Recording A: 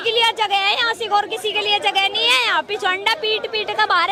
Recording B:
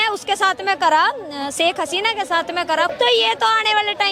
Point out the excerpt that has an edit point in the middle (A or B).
B